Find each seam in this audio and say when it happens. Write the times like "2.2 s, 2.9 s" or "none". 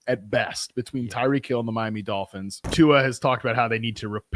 2.7 s

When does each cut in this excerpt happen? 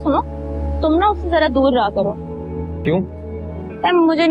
none

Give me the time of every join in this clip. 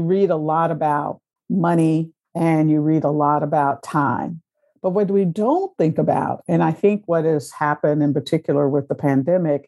2.2 s

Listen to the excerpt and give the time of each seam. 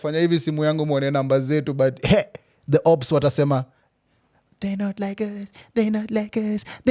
none

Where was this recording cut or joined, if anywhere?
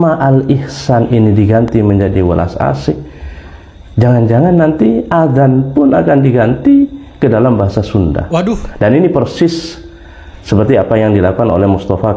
none

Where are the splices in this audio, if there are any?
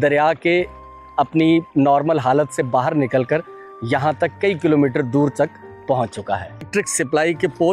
6.7 s

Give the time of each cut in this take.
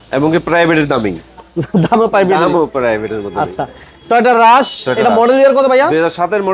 none

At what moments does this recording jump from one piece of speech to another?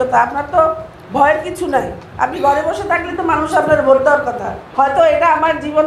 4.6 s

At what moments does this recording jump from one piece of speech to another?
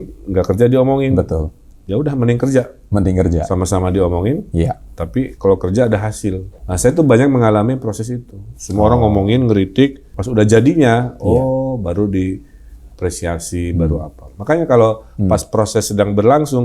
6.6 s, 10.1 s

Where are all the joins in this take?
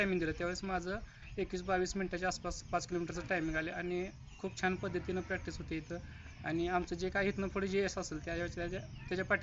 none

